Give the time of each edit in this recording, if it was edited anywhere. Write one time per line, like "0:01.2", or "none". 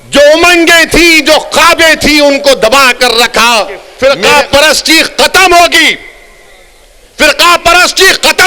0:03.9